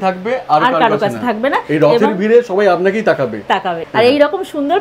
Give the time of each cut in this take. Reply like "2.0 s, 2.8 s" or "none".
3.8 s